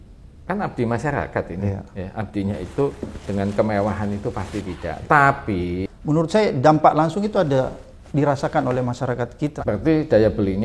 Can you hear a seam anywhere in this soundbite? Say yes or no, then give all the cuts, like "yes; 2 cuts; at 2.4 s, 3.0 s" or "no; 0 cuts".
yes; 2 cuts; at 5.8 s, 9.5 s